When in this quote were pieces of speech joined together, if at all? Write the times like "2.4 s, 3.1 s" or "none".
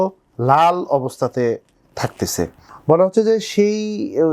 2.7 s